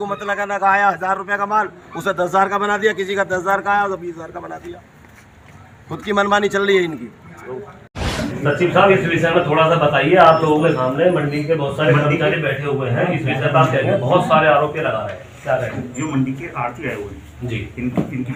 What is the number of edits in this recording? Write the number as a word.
zero